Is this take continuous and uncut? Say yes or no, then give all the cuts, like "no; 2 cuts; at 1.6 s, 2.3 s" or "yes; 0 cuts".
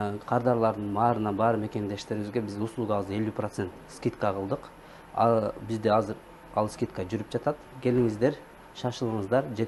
yes; 0 cuts